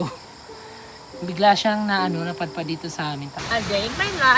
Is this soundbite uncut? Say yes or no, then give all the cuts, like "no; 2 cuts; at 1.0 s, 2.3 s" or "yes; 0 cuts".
no; 1 cut; at 3.4 s